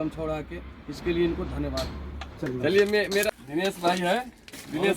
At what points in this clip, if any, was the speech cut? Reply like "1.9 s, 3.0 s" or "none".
3.3 s